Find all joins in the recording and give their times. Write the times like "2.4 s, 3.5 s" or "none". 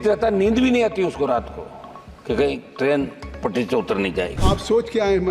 4.4 s